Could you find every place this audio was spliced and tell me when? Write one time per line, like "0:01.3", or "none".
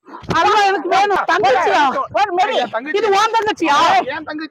0:01.2